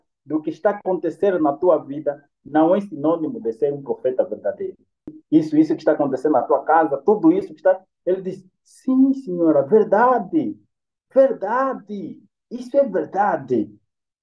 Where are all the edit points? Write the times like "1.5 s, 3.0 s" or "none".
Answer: 5.1 s